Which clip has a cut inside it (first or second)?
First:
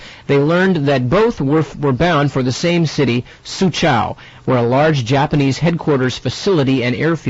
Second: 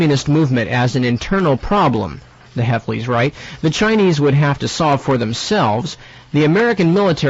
first